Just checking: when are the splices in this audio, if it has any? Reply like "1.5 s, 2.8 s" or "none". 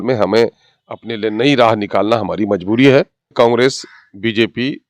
3.3 s